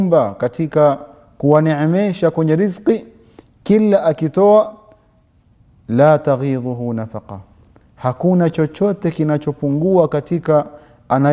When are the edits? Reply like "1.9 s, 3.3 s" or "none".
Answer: none